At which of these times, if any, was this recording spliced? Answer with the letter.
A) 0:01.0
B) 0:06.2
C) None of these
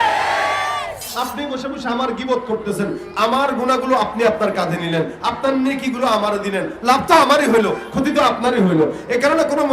A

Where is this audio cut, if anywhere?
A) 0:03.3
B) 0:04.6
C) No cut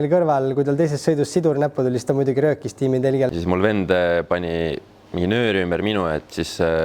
A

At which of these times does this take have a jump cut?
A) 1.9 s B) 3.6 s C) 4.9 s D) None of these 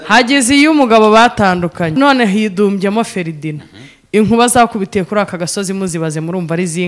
A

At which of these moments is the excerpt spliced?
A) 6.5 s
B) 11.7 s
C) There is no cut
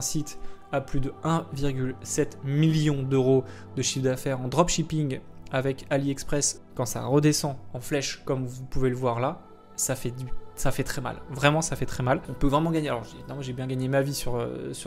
A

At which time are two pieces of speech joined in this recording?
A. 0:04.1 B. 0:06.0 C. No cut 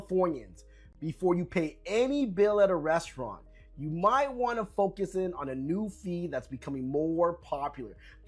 C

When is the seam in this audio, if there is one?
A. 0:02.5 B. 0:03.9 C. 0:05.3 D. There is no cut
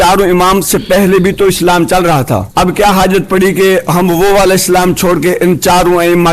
A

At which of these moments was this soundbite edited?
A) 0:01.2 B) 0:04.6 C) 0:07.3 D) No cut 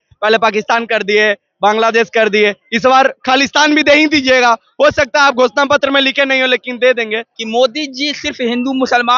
C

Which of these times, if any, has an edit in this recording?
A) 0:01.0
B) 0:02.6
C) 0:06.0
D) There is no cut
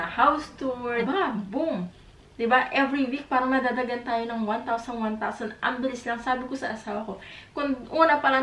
A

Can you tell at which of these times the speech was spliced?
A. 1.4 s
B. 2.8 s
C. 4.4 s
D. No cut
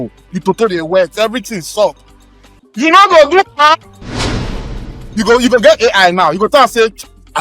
C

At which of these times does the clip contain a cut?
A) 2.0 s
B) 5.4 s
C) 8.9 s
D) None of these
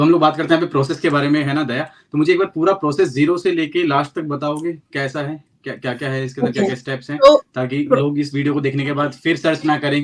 D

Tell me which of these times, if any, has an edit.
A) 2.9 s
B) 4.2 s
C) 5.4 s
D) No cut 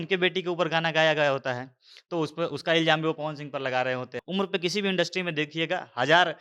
B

